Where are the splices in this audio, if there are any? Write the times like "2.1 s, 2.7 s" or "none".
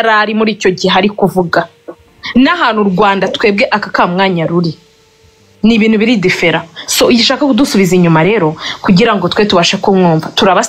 none